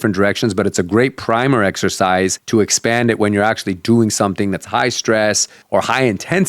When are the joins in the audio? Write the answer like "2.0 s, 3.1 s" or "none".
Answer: 2.4 s, 5.5 s